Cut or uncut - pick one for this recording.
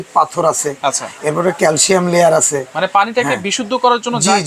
uncut